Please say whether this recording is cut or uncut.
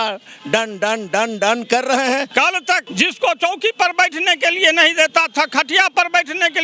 cut